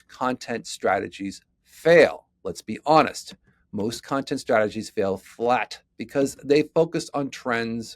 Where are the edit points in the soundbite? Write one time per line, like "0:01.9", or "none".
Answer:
none